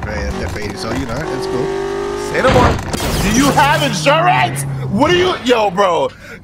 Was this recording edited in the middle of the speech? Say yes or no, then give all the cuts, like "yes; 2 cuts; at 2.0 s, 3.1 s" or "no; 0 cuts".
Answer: no; 0 cuts